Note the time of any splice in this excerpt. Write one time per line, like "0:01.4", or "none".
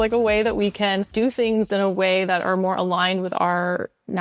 0:01.1